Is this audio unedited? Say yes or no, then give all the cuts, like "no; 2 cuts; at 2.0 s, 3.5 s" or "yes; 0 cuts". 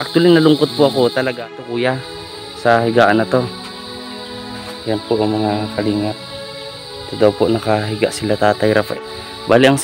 no; 2 cuts; at 2.0 s, 8.9 s